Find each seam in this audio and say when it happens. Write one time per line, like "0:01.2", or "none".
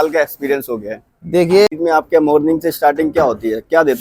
0:01.7